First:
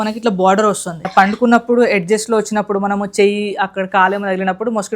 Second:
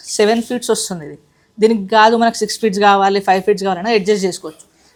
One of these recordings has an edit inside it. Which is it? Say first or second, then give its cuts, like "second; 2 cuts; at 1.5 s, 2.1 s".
first; 1 cut; at 1.1 s